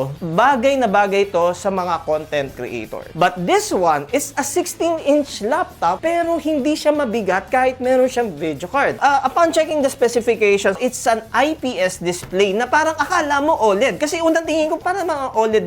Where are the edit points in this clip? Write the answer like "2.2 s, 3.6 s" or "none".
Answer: 3.1 s, 9.0 s, 14.8 s